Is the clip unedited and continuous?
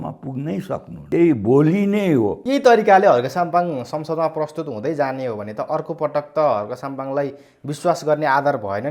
no; 2 cuts; at 0.9 s, 2.4 s

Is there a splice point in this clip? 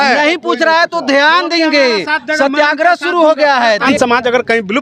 yes; 1 cut; at 3.9 s

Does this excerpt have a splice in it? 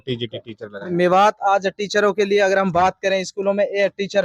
no; 0 cuts

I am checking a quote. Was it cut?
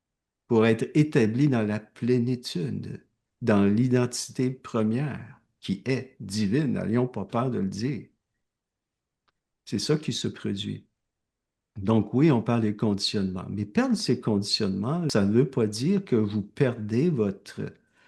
yes; 1 cut; at 15.1 s

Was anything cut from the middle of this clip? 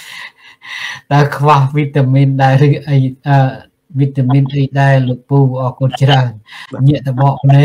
no; 0 cuts

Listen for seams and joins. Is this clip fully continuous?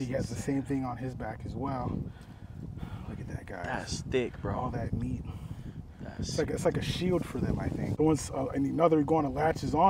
no; 1 cut; at 7.9 s

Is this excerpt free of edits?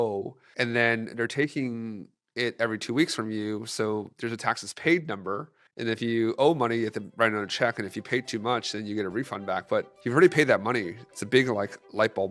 yes; 0 cuts

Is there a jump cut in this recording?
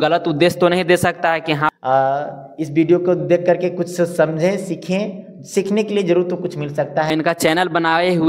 yes; 2 cuts; at 1.7 s, 7.1 s

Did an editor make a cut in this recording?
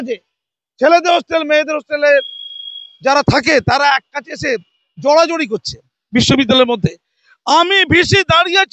no; 0 cuts

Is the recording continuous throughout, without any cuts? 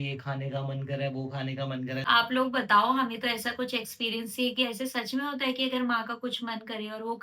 no; 1 cut; at 2.0 s

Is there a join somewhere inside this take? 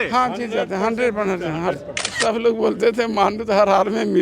yes; 1 cut; at 2.2 s

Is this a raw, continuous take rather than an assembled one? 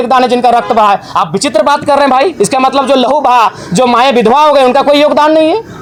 yes; 0 cuts

